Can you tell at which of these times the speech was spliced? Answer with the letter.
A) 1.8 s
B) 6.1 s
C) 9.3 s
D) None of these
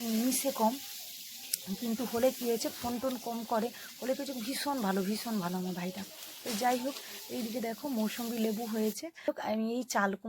C